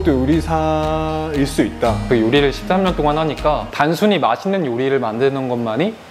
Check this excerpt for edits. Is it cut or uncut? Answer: cut